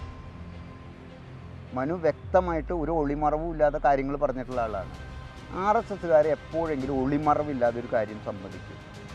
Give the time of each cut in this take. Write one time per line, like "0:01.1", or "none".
none